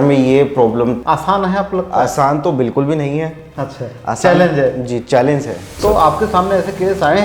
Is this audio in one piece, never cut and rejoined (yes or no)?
no